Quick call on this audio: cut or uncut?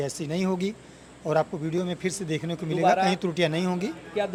uncut